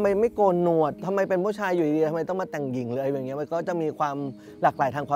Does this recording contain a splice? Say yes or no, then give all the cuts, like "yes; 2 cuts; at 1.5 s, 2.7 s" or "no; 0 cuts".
no; 0 cuts